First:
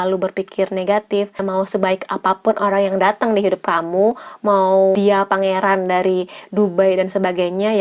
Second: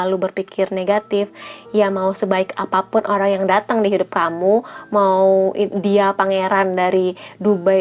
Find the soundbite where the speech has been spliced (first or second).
first